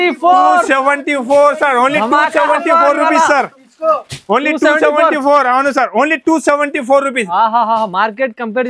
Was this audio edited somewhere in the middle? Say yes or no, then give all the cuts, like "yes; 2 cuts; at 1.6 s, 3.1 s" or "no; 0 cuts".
no; 0 cuts